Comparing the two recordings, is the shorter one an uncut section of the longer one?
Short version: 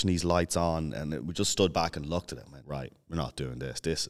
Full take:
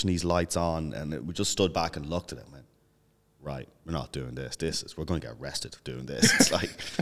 no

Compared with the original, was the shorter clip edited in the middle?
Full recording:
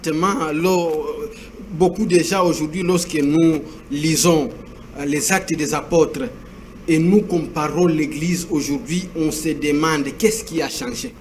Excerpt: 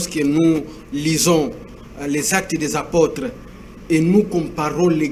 no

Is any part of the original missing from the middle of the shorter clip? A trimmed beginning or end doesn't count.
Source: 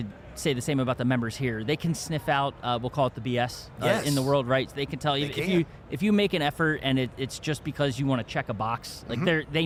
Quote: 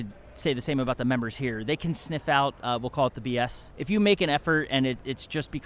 yes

